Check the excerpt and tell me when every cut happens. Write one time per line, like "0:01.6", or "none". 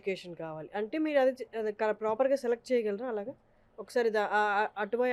none